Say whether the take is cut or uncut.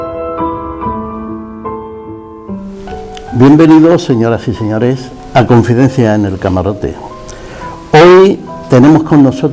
uncut